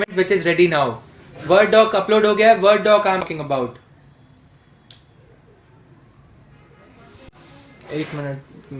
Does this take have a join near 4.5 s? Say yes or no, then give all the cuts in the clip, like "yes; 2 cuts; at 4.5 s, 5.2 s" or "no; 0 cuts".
no; 1 cut; at 3.2 s